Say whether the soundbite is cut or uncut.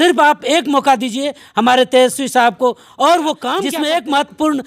cut